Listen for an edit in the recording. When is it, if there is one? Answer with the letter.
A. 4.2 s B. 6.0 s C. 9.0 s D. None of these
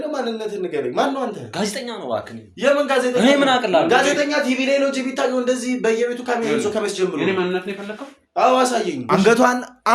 C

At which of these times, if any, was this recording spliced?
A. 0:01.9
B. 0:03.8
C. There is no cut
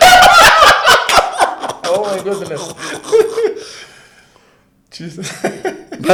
C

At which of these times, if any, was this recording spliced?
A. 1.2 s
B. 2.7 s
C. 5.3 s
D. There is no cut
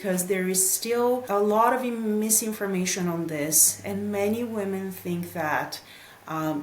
A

